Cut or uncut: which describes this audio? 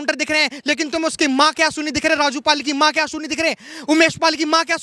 uncut